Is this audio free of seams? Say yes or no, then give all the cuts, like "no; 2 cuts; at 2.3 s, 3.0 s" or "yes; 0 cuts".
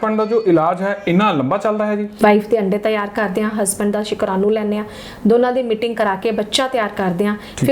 no; 1 cut; at 2.2 s